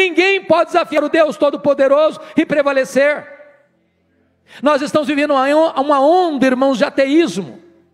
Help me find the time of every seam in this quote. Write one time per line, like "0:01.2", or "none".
0:00.9